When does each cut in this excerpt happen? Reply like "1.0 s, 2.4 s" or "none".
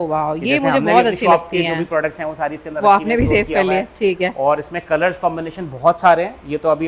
none